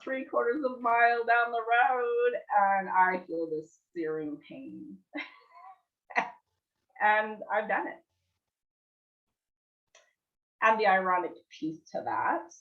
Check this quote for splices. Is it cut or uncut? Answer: uncut